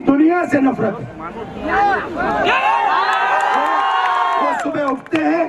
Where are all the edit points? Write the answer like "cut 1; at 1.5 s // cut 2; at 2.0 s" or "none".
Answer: none